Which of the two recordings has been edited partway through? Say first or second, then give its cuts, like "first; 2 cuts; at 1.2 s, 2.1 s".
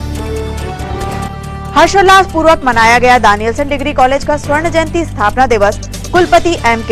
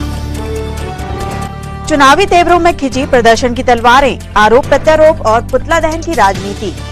first; 1 cut; at 1.1 s